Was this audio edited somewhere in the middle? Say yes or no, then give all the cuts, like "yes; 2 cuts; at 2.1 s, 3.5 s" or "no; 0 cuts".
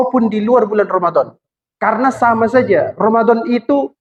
no; 0 cuts